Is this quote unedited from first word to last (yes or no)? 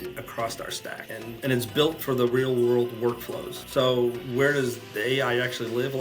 no